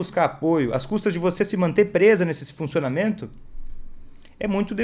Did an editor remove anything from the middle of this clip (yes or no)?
no